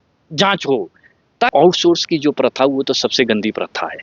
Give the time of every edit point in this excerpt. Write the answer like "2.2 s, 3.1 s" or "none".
1.5 s